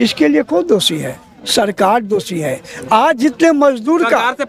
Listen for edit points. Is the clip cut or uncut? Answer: uncut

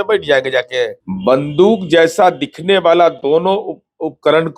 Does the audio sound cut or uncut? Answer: cut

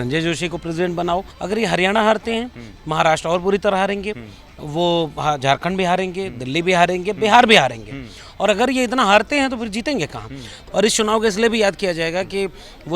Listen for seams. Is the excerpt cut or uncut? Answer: cut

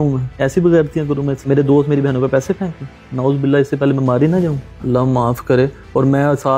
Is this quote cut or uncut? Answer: uncut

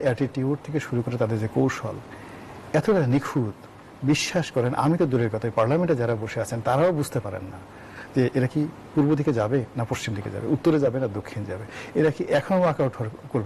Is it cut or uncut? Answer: uncut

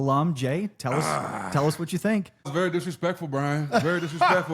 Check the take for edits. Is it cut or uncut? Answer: cut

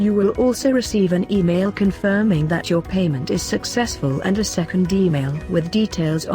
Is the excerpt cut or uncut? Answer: cut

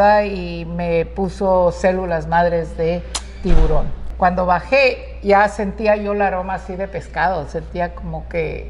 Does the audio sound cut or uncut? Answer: cut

